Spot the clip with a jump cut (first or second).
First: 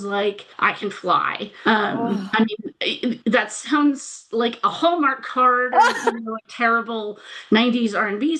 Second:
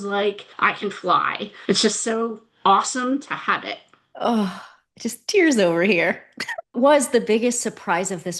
second